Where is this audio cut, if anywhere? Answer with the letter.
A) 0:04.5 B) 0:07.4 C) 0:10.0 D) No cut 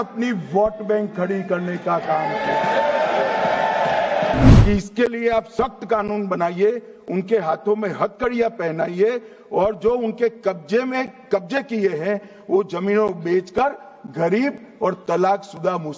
A